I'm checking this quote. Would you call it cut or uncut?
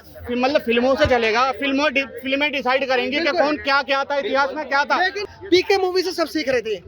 cut